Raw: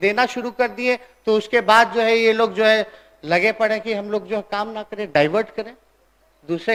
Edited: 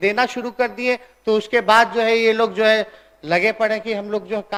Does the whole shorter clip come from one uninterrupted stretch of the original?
yes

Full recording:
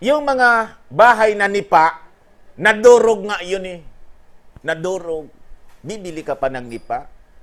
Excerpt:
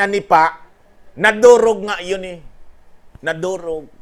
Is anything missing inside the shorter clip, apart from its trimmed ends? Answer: no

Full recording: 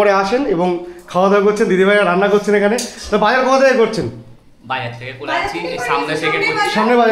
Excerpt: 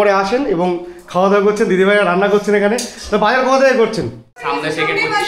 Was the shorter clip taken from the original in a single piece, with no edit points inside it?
no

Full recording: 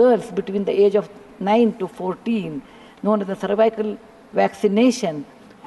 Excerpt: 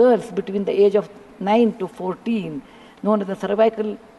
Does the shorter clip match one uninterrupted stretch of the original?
yes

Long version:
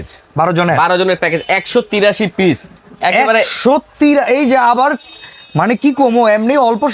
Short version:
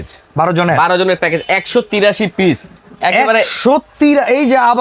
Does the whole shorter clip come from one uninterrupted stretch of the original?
yes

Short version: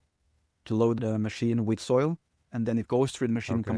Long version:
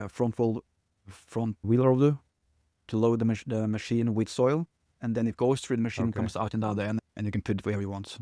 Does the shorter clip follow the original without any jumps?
no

